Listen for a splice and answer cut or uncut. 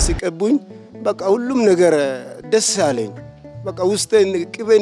uncut